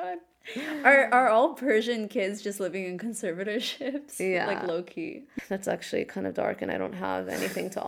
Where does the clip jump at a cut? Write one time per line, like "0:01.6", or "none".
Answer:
0:05.3